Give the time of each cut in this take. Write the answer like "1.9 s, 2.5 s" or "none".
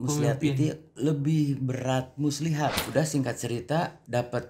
2.8 s